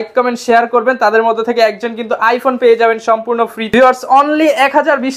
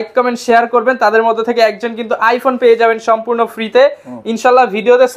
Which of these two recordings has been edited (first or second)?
first